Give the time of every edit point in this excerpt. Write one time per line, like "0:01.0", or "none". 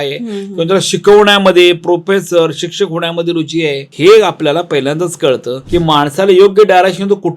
0:05.6